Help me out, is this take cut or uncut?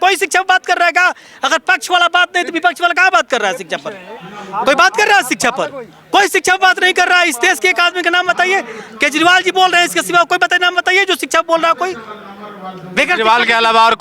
uncut